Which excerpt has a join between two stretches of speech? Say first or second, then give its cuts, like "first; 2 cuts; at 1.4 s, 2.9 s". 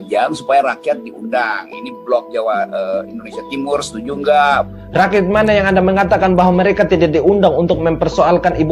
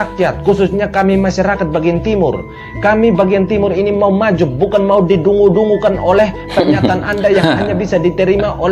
first; 1 cut; at 4.7 s